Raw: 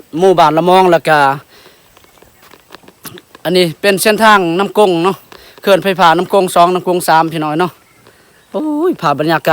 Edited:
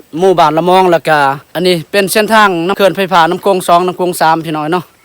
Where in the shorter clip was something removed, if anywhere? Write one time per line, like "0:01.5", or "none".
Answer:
0:01.5
0:02.7